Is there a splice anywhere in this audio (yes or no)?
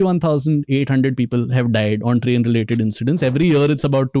no